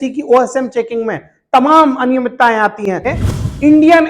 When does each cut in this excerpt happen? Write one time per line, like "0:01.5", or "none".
0:03.1